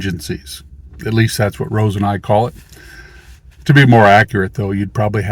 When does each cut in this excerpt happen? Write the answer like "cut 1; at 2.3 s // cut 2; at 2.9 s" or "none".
none